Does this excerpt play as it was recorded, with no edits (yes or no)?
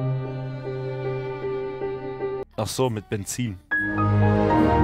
no